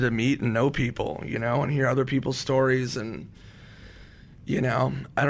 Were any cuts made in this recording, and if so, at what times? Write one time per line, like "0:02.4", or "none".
none